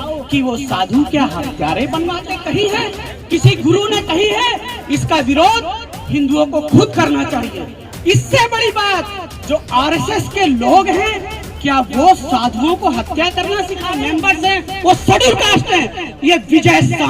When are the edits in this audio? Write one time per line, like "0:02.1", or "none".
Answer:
0:02.3
0:14.0